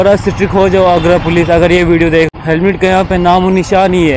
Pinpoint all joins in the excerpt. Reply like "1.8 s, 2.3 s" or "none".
2.3 s